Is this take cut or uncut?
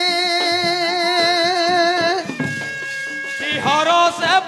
cut